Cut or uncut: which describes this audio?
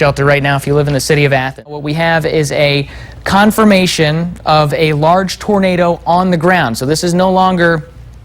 cut